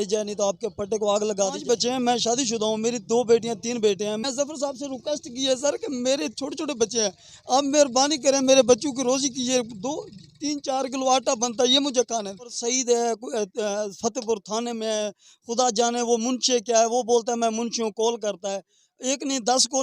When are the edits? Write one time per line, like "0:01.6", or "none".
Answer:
0:01.6
0:04.2
0:12.7

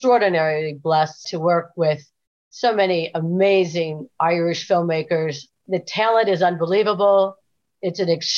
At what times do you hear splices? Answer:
0:01.3
0:05.5

